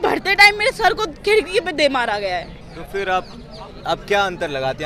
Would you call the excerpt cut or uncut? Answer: uncut